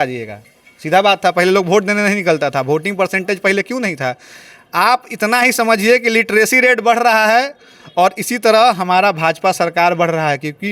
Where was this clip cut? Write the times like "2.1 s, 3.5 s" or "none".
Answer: none